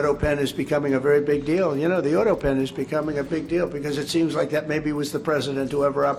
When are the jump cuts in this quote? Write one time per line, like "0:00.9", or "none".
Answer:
none